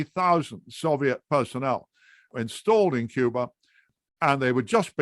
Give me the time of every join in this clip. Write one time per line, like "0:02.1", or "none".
0:02.3
0:03.9